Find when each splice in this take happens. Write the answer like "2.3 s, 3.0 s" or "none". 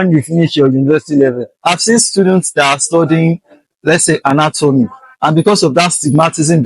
1.5 s